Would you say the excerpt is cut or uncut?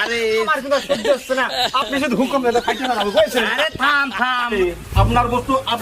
cut